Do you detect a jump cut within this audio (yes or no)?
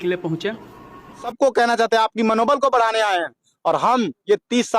yes